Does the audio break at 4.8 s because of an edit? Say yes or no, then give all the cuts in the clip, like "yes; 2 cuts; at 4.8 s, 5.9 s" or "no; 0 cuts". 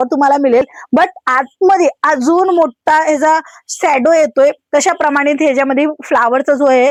no; 0 cuts